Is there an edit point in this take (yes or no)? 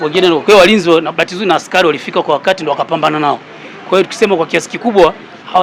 no